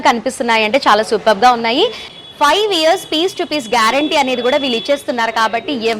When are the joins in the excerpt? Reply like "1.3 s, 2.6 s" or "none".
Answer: 2.0 s